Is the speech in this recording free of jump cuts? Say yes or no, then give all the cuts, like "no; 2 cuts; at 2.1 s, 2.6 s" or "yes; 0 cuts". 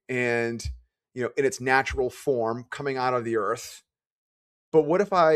yes; 0 cuts